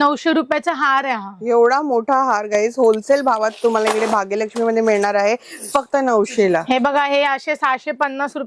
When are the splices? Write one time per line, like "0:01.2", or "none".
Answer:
none